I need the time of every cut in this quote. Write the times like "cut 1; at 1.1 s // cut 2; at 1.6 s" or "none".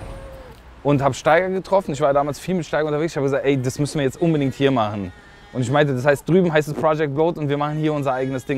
none